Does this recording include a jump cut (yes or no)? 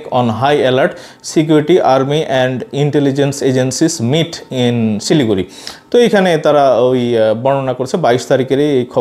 no